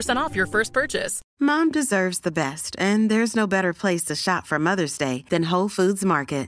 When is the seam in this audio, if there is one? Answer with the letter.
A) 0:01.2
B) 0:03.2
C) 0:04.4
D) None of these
A